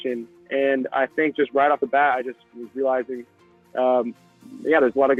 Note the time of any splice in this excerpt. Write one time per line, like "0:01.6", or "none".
none